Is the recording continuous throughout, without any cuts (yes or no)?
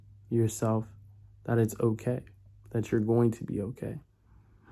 yes